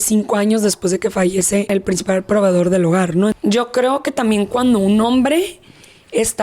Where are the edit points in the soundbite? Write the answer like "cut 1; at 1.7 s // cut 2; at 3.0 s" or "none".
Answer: cut 1; at 1.7 s // cut 2; at 3.4 s